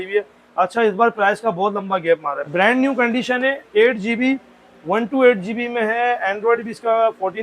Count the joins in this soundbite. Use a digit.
1